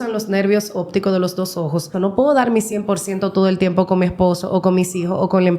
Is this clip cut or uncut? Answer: cut